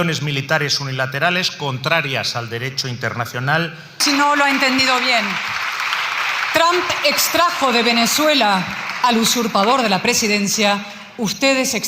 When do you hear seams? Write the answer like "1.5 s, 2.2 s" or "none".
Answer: 4.0 s